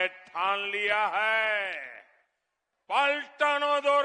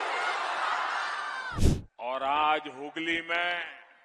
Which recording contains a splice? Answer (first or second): second